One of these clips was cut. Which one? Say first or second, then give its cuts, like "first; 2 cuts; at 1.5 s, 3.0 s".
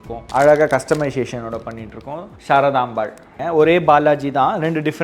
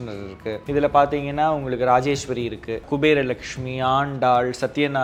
first; 1 cut; at 3.3 s